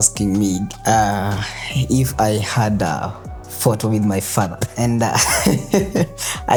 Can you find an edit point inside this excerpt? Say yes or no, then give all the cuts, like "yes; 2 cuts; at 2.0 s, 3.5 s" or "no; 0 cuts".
no; 0 cuts